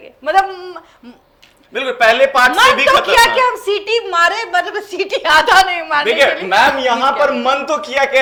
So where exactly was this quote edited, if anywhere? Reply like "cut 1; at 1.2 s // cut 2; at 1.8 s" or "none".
none